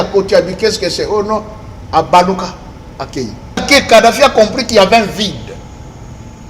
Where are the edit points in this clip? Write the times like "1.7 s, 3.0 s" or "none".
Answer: 3.6 s